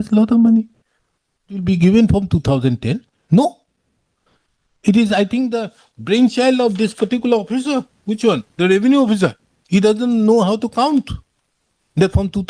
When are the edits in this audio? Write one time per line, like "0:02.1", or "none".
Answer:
0:01.6